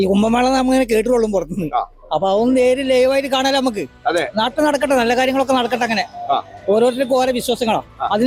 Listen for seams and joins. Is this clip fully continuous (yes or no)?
yes